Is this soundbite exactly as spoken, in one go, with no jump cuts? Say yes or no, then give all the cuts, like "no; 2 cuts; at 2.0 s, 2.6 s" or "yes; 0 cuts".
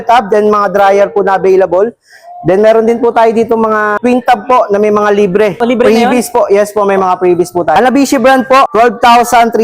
no; 4 cuts; at 3.9 s, 5.6 s, 7.7 s, 8.7 s